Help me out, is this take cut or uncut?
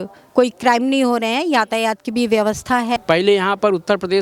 cut